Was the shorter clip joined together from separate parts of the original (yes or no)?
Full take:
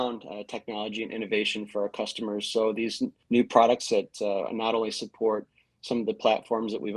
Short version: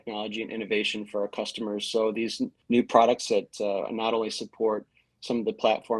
no